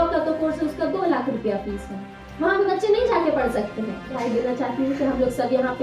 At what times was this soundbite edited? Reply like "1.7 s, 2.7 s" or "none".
4.2 s